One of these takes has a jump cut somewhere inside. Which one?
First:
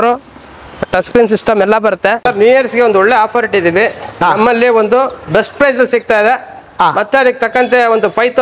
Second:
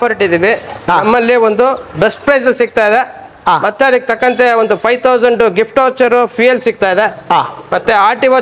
first; 1 cut; at 2.2 s

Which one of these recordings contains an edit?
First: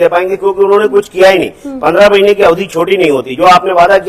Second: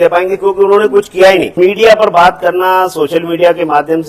second; 1 cut; at 1.5 s

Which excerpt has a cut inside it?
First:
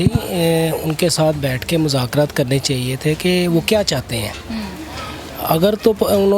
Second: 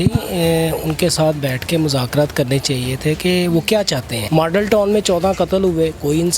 second; 1 cut; at 4.1 s

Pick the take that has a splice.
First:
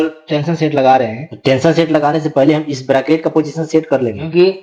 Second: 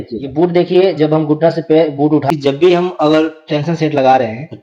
second; 1 cut; at 2.3 s

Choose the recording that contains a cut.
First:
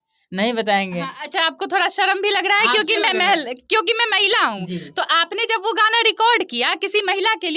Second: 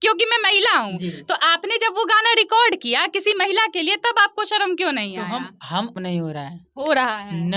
second; 1 cut; at 6.0 s

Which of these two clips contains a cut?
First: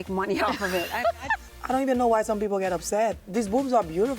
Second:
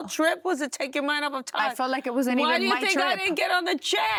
first; 2 cuts; at 1.4 s, 3.2 s

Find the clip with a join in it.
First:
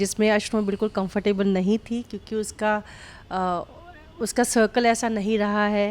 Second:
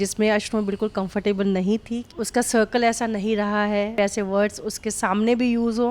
second; 2 cuts; at 2.1 s, 3.9 s

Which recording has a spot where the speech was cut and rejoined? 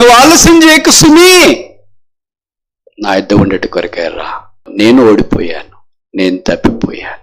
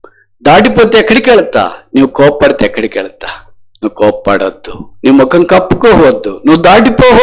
first; 1 cut; at 4.6 s

